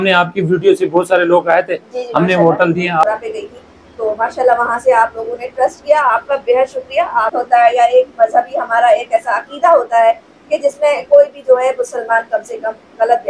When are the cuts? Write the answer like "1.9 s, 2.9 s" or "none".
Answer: 3.0 s, 7.4 s